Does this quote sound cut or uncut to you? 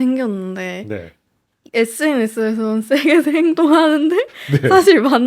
uncut